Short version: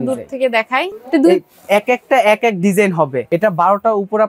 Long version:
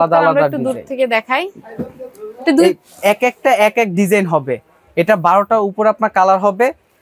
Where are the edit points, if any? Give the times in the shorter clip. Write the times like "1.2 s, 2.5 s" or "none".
1.0 s, 3.2 s